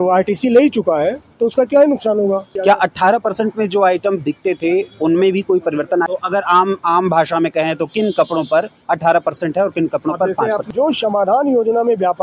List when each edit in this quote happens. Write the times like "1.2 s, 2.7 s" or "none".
2.5 s, 6.1 s, 10.7 s

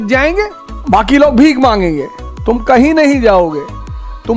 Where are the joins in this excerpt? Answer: none

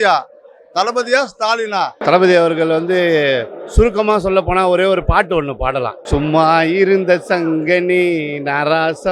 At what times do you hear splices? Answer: 1.9 s, 6.0 s

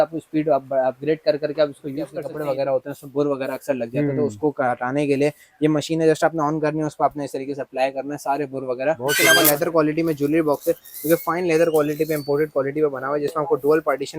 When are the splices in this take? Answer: 2.2 s, 9.2 s

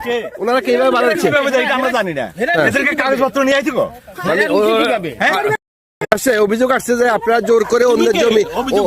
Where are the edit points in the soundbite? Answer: 6.1 s

